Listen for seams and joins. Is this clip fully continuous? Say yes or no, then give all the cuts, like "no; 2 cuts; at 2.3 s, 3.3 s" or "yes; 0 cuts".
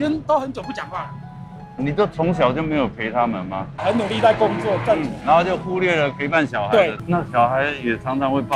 no; 1 cut; at 7.0 s